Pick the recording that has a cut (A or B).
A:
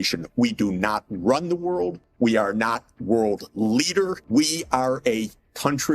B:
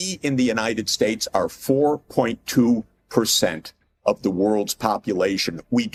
A